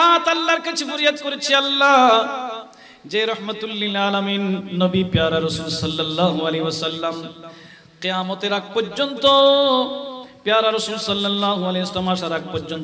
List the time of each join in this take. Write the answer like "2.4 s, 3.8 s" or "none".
none